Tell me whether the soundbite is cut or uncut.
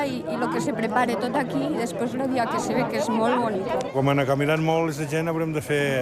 cut